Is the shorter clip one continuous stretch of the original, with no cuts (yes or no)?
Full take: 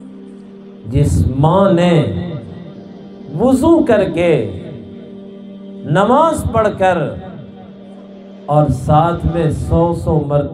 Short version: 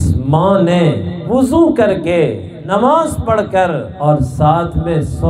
no